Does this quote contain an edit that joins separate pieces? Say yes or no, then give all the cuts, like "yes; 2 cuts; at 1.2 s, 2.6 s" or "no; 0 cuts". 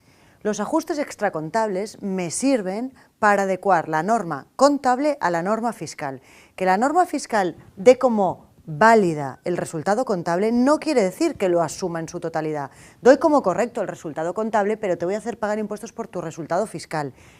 yes; 1 cut; at 11.0 s